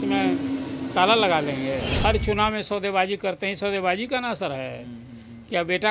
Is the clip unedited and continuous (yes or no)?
no